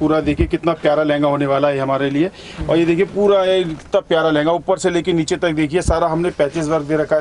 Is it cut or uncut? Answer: uncut